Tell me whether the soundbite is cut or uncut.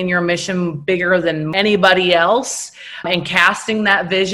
cut